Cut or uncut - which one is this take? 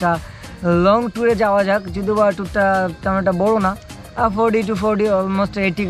uncut